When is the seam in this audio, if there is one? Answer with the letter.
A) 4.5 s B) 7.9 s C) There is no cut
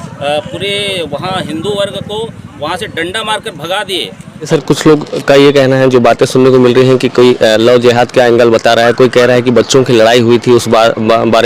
A